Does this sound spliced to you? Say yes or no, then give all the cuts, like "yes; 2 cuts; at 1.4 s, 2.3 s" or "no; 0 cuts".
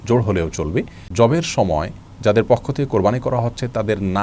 yes; 1 cut; at 1.0 s